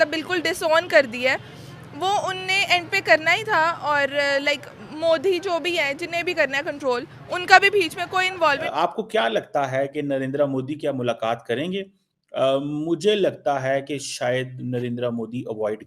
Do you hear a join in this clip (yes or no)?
yes